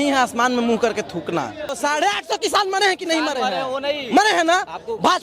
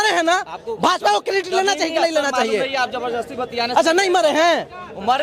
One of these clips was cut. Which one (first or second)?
first